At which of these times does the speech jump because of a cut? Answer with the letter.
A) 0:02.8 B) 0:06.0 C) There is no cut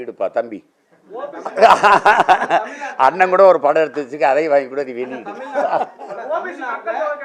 C